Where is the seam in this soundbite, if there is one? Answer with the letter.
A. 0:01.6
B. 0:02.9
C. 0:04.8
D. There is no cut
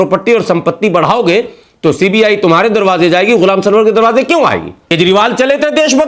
C